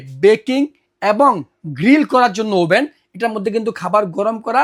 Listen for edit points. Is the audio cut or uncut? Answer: uncut